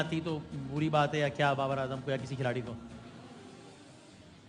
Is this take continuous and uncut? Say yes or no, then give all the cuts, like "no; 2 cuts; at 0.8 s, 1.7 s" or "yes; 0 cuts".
yes; 0 cuts